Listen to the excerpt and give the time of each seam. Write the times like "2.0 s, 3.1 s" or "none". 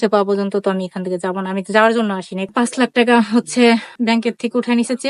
2.5 s, 4.0 s